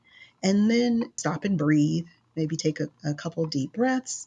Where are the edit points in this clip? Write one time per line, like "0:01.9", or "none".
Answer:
0:01.2